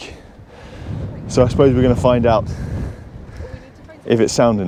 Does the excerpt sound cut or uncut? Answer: uncut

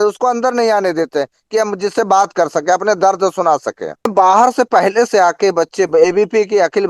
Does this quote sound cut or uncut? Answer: cut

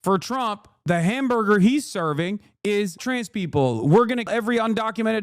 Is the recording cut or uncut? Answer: cut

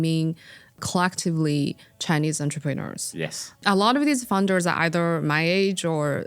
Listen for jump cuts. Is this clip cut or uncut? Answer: cut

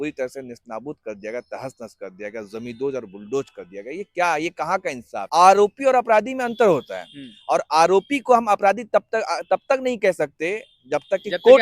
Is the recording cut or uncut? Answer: cut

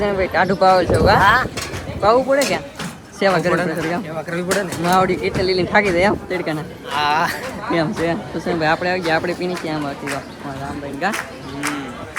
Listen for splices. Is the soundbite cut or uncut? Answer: uncut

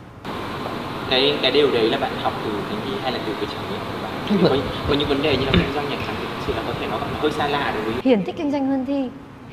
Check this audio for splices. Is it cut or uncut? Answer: cut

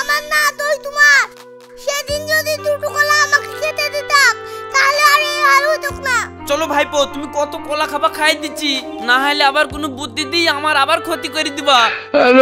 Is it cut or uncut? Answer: uncut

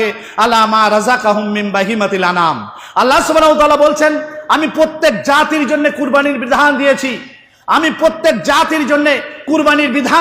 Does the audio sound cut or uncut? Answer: uncut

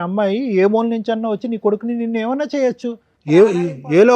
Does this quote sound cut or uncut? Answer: cut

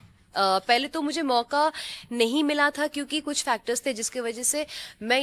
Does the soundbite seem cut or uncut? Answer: uncut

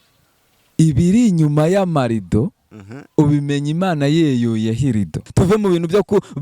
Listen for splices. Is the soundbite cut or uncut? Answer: cut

